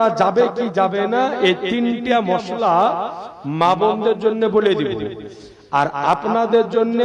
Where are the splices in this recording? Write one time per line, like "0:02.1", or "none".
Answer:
none